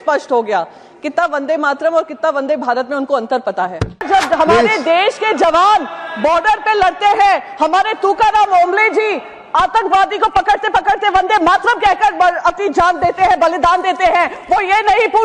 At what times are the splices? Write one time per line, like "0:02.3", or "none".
0:04.1

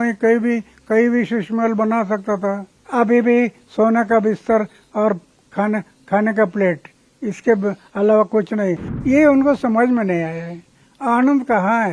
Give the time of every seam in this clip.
0:02.7
0:08.9

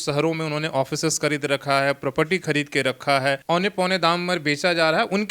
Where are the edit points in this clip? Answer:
0:03.4

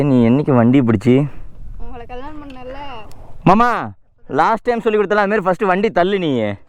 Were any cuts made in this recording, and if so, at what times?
none

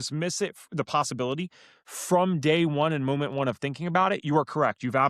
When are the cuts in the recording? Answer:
none

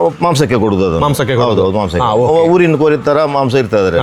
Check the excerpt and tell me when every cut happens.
none

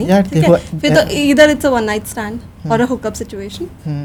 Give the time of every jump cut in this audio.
none

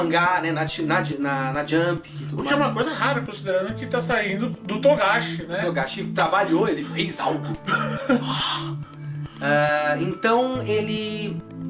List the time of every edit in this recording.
none

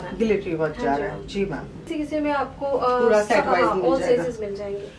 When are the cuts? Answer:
0:01.9

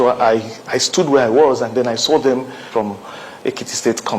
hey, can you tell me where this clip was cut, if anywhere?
0:02.7

